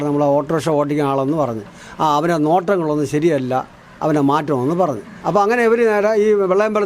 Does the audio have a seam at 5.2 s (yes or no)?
yes